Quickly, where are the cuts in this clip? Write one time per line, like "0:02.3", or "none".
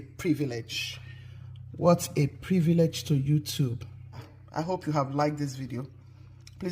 0:04.3